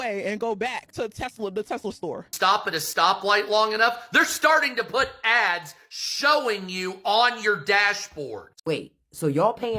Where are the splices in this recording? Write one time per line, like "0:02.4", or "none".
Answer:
0:02.3
0:08.4

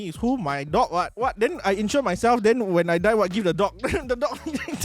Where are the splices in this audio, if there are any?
0:01.1

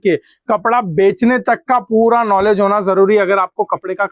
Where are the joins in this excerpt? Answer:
none

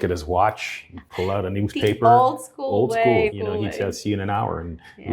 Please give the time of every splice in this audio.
none

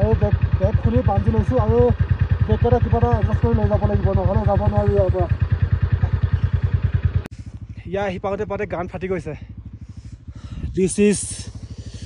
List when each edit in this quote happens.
0:07.3

